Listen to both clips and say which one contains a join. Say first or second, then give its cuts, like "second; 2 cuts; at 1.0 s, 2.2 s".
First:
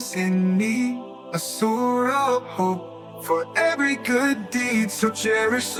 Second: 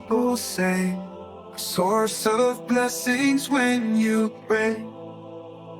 second; 1 cut; at 4.9 s